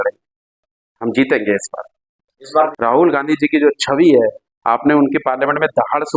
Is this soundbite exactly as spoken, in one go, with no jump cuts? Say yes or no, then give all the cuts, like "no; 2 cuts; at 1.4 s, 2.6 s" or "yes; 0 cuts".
no; 1 cut; at 2.7 s